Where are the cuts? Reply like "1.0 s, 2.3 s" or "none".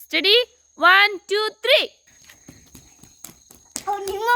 2.1 s